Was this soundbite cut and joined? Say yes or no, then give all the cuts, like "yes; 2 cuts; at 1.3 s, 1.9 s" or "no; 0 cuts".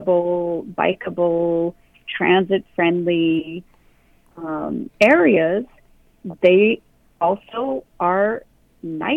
no; 0 cuts